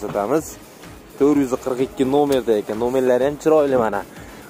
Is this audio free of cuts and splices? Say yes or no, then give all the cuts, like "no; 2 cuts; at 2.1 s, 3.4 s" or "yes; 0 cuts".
yes; 0 cuts